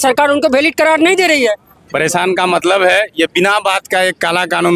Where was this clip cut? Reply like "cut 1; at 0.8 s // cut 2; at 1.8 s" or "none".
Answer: cut 1; at 1.7 s